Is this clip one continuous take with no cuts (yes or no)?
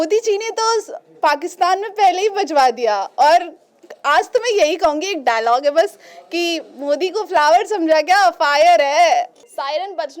yes